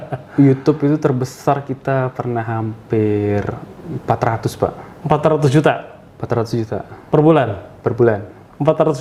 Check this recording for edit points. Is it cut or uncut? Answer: uncut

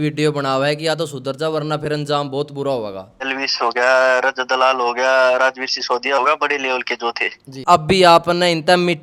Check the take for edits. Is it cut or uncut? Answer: cut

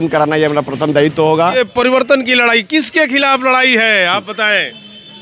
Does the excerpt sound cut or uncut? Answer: cut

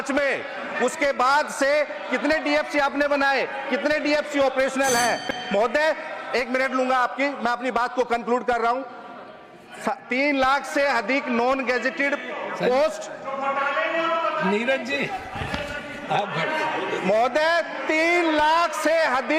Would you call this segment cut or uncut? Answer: uncut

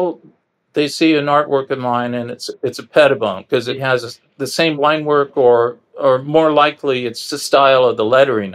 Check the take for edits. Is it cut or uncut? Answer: cut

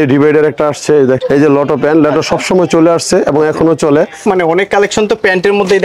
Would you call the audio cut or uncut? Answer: cut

